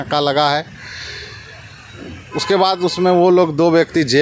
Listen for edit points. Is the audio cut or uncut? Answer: uncut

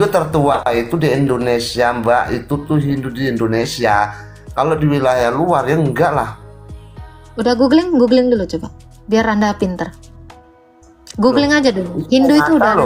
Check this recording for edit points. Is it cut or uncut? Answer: uncut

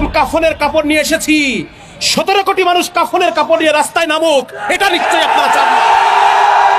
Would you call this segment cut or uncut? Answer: uncut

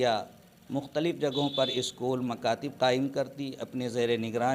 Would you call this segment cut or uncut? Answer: uncut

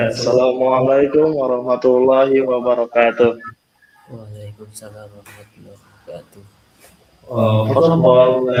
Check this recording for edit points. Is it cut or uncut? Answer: uncut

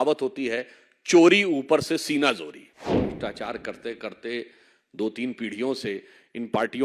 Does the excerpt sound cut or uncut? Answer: cut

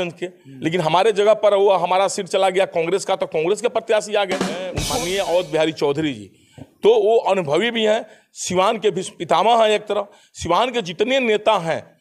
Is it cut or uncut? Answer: cut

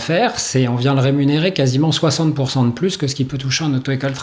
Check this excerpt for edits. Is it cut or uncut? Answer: uncut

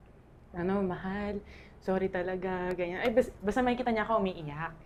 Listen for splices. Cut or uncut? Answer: uncut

